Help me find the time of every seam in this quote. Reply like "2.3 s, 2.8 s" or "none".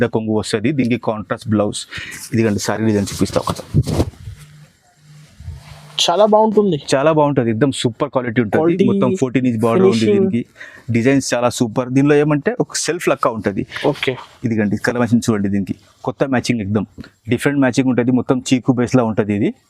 none